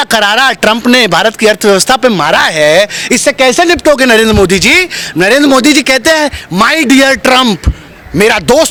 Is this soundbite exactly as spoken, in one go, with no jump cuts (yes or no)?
yes